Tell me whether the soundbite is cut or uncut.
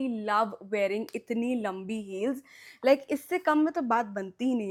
uncut